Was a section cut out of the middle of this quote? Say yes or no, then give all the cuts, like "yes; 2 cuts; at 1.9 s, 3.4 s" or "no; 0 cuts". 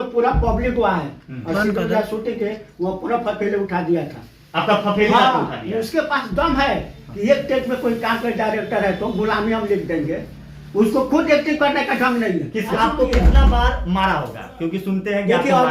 yes; 1 cut; at 12.7 s